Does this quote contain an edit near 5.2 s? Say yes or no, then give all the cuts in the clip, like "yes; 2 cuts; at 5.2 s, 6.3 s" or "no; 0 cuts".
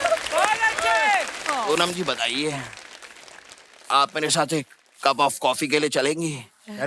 no; 1 cut; at 1.4 s